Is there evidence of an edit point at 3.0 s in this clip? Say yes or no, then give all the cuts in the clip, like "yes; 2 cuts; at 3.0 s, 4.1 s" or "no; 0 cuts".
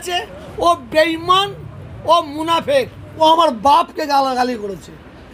yes; 1 cut; at 3.0 s